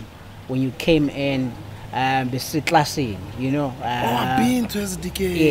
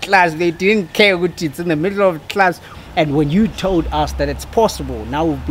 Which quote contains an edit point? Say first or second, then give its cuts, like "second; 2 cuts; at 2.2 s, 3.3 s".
second; 1 cut; at 2.7 s